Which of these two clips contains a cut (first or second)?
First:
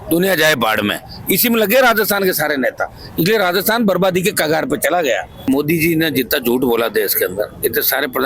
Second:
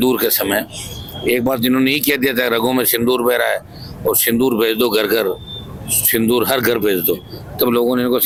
first